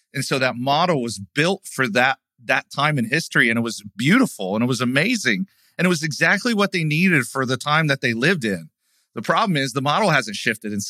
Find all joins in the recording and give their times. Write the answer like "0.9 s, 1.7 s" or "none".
none